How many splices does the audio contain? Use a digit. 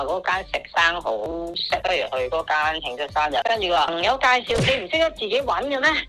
0